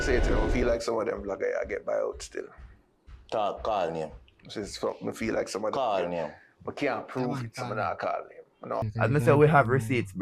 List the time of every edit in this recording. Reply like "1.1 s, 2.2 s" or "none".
8.9 s